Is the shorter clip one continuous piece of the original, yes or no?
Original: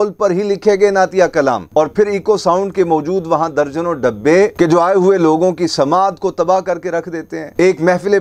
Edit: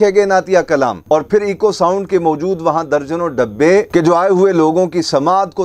yes